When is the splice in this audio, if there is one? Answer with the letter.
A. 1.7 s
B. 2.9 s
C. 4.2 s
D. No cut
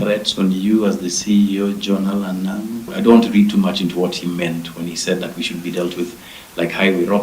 B